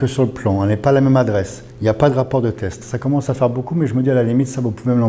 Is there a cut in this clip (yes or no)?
no